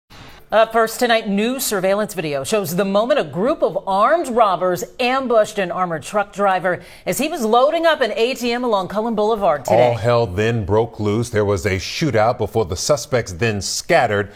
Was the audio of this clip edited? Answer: no; 0 cuts

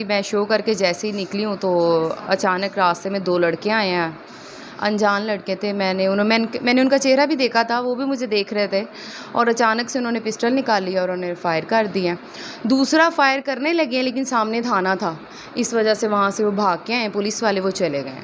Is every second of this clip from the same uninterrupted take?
yes; 0 cuts

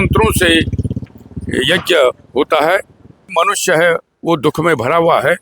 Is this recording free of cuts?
no; 2 cuts; at 1.0 s, 3.3 s

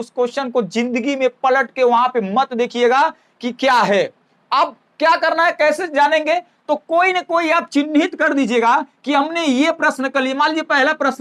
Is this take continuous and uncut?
yes; 0 cuts

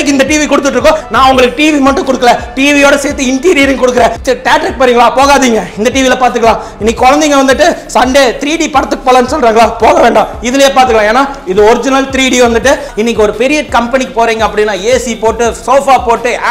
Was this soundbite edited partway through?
yes; 3 cuts; at 1.0 s, 4.2 s, 12.9 s

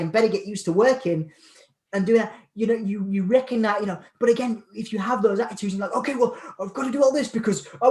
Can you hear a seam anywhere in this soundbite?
no; 0 cuts

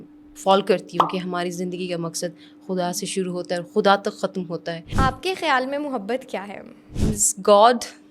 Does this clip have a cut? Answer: yes; 2 cuts; at 4.9 s, 6.9 s

